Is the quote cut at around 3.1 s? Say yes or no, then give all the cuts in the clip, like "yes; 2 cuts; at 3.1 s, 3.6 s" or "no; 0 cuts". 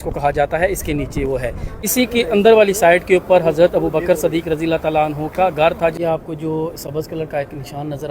no; 2 cuts; at 1.7 s, 6.0 s